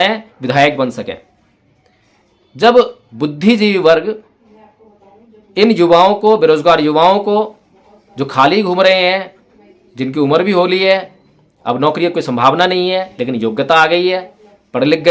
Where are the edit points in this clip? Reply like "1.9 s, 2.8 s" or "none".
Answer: 3.0 s

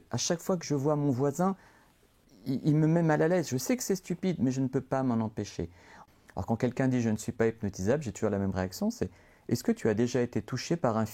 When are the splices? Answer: 6.0 s

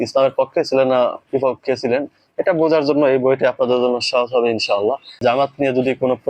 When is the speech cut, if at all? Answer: 5.2 s

